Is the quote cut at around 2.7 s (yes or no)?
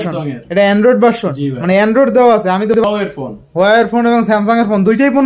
yes